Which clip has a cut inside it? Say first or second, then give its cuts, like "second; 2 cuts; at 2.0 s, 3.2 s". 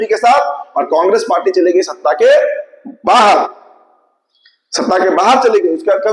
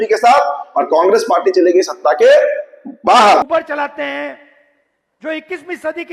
second; 1 cut; at 3.4 s